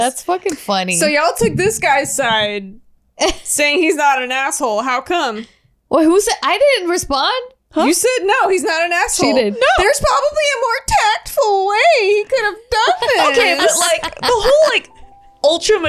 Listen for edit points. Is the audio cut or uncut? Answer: uncut